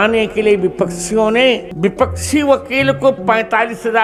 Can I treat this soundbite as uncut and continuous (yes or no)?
yes